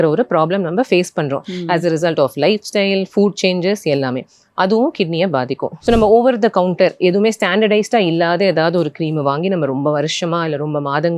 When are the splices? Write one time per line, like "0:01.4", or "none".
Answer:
0:05.7